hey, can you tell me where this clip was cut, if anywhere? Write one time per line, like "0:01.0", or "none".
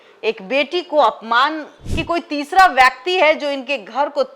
0:01.7